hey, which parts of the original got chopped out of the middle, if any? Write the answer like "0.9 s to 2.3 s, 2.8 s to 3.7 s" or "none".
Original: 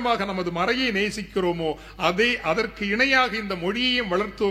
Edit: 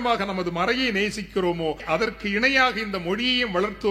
1.8 s to 2.4 s